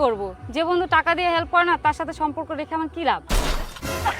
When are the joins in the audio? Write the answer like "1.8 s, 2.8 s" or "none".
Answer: 3.3 s